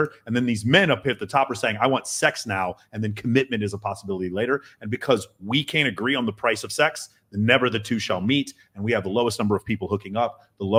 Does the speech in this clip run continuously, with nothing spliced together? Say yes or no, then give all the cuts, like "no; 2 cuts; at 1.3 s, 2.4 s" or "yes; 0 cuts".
yes; 0 cuts